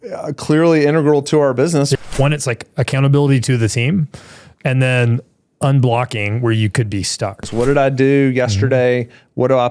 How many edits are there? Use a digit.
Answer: 2